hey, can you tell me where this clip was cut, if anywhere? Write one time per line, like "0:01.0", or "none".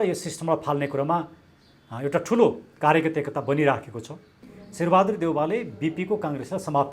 0:04.4